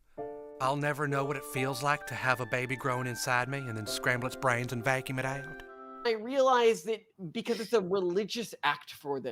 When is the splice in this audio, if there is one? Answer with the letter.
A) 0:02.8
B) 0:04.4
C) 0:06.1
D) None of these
C